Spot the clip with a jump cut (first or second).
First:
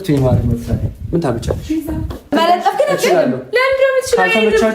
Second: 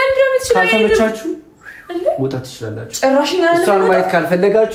first